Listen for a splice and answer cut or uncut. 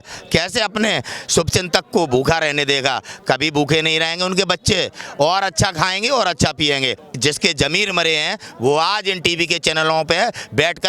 cut